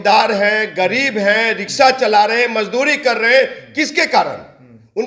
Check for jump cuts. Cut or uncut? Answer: uncut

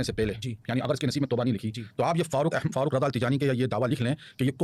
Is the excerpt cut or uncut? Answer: uncut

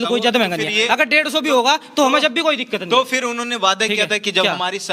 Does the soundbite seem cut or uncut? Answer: uncut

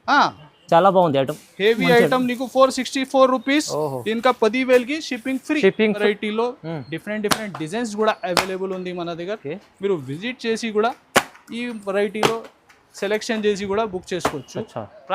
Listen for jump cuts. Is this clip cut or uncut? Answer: cut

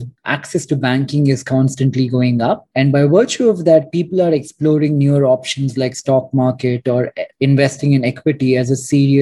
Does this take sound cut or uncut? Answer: cut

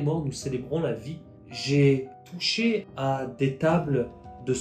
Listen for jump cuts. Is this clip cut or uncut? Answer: cut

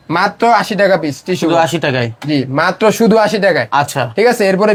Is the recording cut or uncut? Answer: uncut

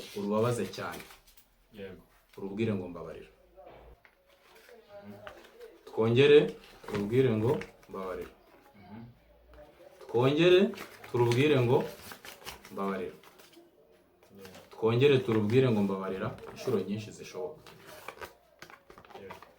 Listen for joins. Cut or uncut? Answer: cut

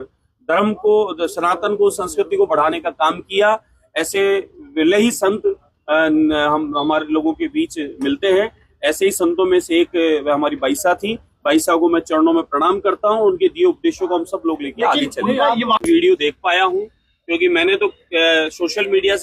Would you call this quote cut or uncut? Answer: cut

